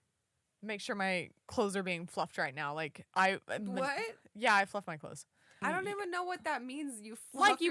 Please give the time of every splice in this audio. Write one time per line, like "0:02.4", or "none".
0:01.4
0:05.6